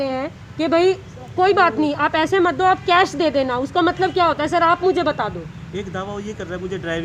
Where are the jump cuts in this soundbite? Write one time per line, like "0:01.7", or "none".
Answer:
none